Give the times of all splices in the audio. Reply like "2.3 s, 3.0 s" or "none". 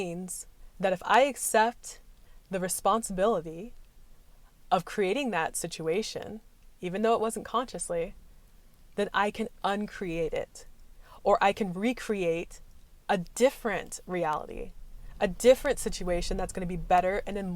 none